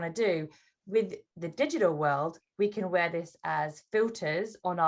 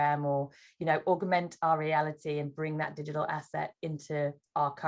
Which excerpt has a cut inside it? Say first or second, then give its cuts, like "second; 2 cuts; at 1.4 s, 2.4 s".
first; 1 cut; at 1.0 s